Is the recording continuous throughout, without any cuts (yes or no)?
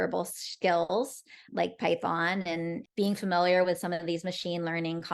no